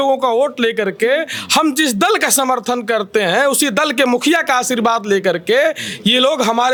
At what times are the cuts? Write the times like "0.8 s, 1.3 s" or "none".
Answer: none